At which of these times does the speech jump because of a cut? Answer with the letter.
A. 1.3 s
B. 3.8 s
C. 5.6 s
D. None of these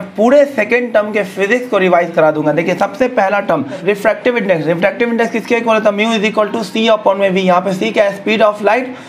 B